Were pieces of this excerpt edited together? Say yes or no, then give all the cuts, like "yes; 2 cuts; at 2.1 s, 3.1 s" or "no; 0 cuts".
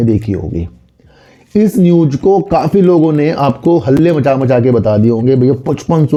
no; 0 cuts